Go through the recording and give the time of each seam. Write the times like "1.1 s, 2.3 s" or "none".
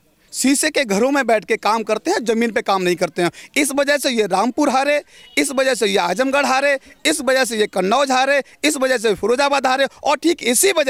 none